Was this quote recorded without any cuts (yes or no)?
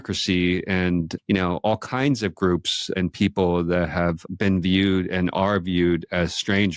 no